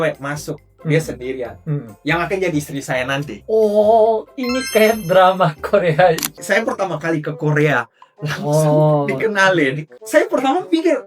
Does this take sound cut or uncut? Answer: cut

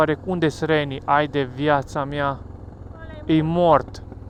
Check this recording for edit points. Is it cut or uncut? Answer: uncut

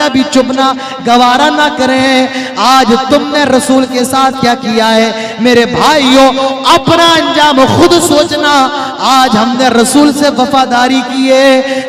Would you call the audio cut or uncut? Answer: uncut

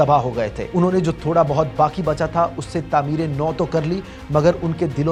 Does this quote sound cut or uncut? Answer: uncut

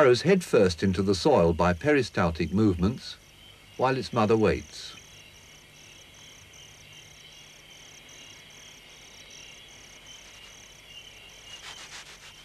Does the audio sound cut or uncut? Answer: uncut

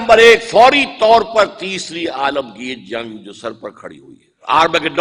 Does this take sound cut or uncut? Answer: uncut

